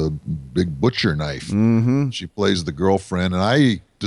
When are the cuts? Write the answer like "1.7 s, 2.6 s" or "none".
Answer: none